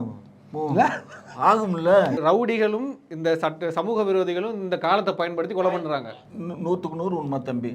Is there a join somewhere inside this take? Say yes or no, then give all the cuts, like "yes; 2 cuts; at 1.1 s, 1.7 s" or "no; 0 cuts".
yes; 1 cut; at 2.2 s